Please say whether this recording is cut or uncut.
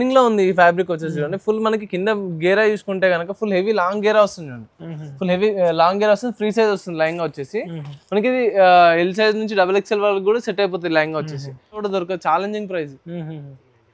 cut